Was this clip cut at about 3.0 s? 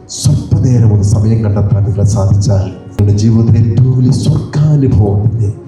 yes; 1 cut; at 3.0 s

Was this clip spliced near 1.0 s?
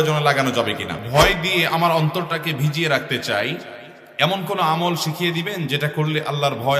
yes; 1 cut; at 1.0 s

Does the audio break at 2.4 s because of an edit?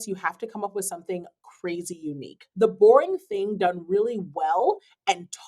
yes; 1 cut; at 2.4 s

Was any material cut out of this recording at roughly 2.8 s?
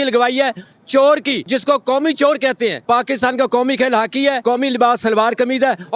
yes; 3 cuts; at 1.4 s, 2.8 s, 4.4 s

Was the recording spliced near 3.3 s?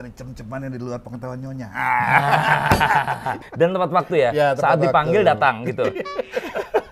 yes; 1 cut; at 3.3 s

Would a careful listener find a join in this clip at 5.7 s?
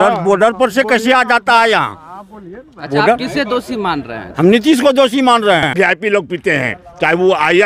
yes; 1 cut; at 5.7 s

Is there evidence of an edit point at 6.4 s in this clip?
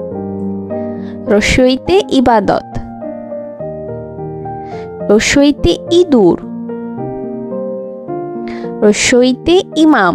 yes; 5 cuts; at 1.0 s, 2.7 s, 4.7 s, 6.4 s, 8.5 s

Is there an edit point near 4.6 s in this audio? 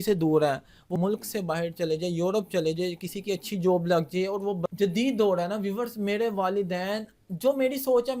yes; 2 cuts; at 0.9 s, 4.6 s

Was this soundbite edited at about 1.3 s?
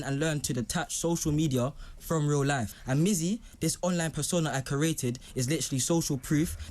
no; 1 cut; at 2.7 s

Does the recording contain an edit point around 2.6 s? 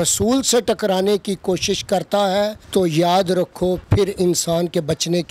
yes; 2 cuts; at 2.6 s, 3.8 s

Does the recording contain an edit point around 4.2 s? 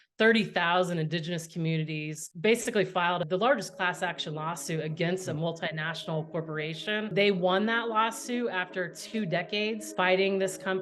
no; 2 cuts; at 7.1 s, 9.9 s

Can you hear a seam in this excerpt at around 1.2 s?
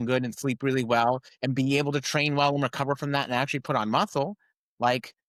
no; 0 cuts

